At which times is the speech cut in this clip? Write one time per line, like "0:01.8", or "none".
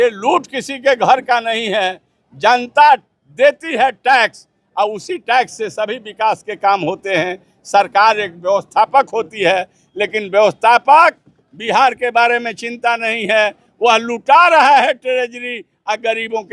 none